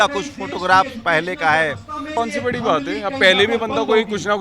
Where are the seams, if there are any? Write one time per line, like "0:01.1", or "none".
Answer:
0:02.2